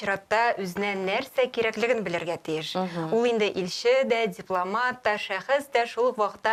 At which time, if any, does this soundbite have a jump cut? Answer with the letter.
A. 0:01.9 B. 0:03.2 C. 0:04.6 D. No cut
D